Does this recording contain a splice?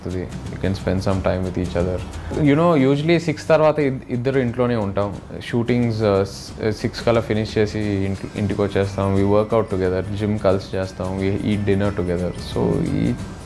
yes; 1 cut; at 2.3 s

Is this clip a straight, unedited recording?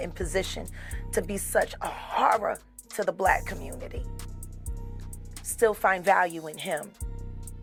yes; 0 cuts

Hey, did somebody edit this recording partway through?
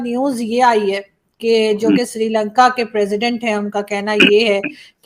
no; 0 cuts

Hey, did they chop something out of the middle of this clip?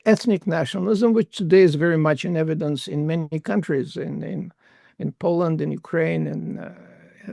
no; 0 cuts

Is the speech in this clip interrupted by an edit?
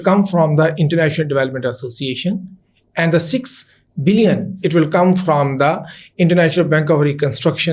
no; 0 cuts

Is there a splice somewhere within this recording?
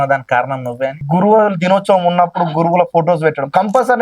yes; 1 cut; at 1.0 s

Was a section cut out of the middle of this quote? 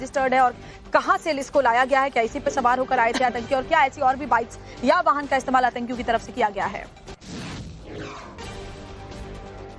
no; 0 cuts

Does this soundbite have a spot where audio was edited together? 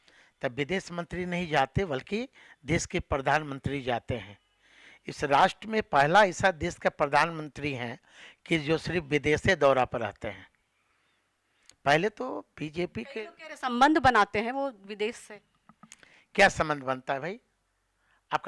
no; 0 cuts

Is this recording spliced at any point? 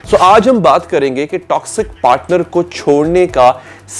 no; 0 cuts

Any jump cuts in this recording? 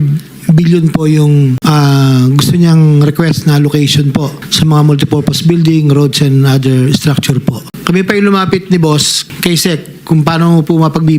yes; 1 cut; at 7.7 s

